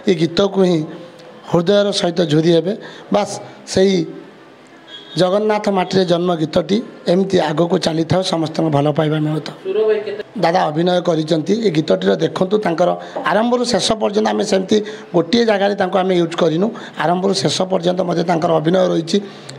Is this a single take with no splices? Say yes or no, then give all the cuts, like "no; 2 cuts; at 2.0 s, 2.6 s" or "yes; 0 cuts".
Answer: no; 1 cut; at 10.2 s